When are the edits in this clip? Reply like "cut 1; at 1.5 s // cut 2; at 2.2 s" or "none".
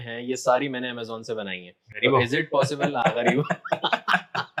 none